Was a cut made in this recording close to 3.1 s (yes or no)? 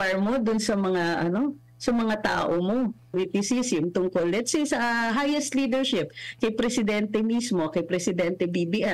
yes